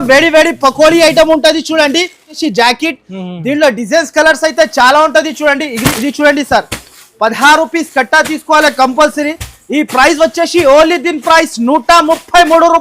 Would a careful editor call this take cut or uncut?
cut